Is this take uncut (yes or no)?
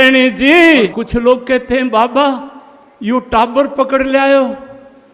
no